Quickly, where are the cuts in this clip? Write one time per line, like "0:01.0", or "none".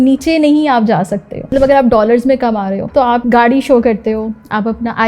0:01.4
0:03.2